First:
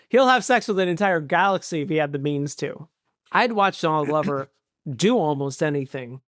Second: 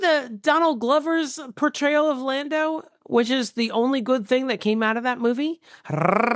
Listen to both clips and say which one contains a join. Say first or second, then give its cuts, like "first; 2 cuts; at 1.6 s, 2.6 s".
first; 1 cut; at 2.7 s